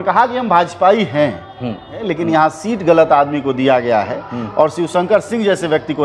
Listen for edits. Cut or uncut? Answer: cut